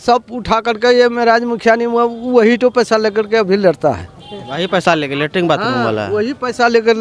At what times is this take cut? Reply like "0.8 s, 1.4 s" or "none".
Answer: none